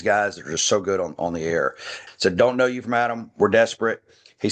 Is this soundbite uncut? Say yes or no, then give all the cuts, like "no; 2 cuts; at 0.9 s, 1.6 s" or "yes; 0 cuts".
no; 1 cut; at 1.9 s